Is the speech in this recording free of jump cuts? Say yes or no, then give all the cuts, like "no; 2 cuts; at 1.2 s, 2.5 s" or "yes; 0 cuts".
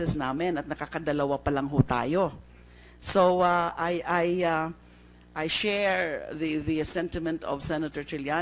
yes; 0 cuts